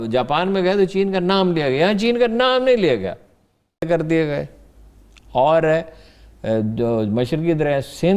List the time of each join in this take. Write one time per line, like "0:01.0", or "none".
0:03.9